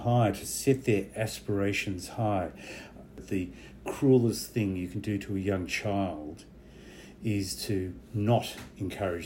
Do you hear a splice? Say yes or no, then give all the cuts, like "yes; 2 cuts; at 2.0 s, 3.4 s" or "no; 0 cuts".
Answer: yes; 1 cut; at 3.2 s